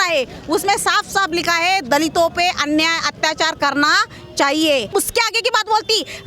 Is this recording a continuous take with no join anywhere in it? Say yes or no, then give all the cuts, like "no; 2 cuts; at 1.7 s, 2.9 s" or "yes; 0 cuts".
no; 1 cut; at 4.9 s